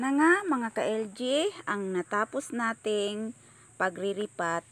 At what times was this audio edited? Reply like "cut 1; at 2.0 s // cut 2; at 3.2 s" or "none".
none

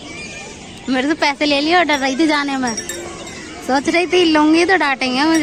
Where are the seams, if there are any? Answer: none

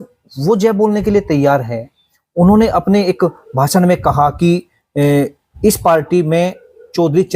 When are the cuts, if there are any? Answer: none

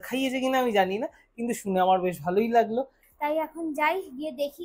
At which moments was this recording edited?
cut 1; at 3.0 s

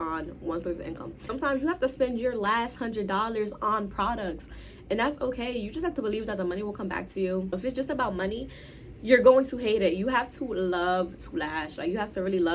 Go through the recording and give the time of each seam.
cut 1; at 1.3 s // cut 2; at 7.5 s

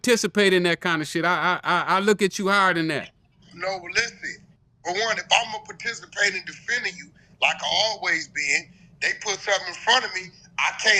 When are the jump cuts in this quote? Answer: none

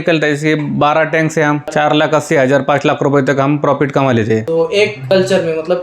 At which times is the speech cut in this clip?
cut 1; at 1.6 s // cut 2; at 4.6 s

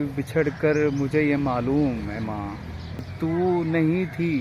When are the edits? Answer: cut 1; at 3.1 s

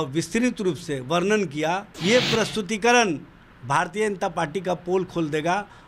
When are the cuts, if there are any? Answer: cut 1; at 1.9 s

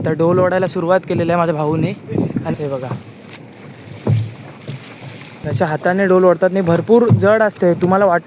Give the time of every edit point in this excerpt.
cut 1; at 2.6 s // cut 2; at 5.4 s

